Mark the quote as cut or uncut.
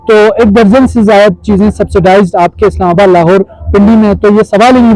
uncut